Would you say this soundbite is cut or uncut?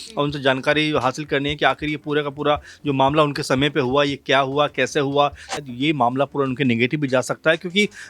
cut